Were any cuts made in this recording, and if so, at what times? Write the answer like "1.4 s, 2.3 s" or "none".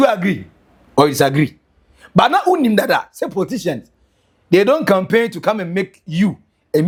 none